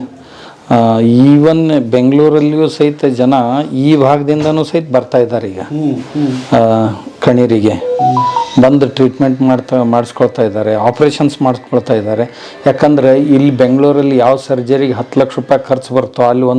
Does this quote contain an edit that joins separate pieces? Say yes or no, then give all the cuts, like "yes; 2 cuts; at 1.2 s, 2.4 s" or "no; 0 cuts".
no; 0 cuts